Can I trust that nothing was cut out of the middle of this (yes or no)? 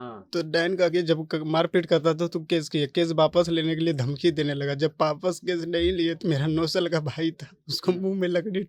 yes